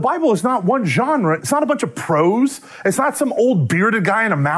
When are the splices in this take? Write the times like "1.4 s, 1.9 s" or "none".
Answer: 1.4 s